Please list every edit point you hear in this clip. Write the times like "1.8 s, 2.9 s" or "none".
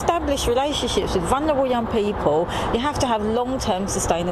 2.7 s